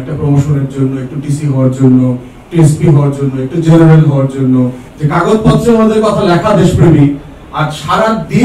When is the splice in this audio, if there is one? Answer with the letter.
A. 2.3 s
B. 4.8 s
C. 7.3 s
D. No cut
B